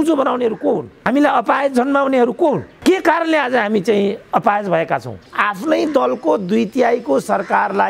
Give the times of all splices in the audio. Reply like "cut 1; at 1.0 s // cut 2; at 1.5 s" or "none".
cut 1; at 0.9 s // cut 2; at 2.7 s // cut 3; at 5.3 s